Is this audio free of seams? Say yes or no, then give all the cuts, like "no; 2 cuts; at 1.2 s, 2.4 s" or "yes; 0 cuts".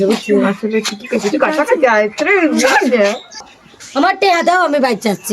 no; 1 cut; at 3.5 s